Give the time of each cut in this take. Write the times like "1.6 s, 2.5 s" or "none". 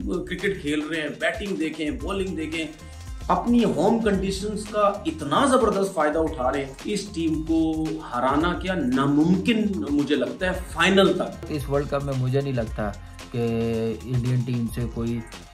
6.7 s, 11.5 s